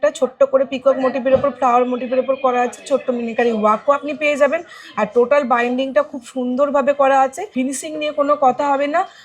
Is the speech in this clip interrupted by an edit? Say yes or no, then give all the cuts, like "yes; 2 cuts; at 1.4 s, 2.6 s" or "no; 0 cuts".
yes; 1 cut; at 7.4 s